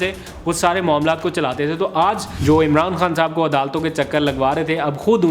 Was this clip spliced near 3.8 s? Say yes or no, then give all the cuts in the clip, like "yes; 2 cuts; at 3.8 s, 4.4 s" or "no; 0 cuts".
no; 1 cut; at 2.3 s